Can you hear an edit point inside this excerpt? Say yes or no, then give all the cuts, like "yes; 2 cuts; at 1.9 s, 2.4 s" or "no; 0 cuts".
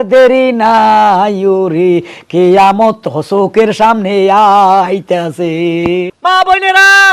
yes; 1 cut; at 6.1 s